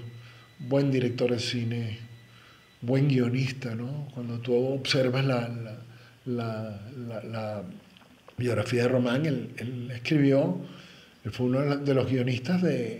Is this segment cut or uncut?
uncut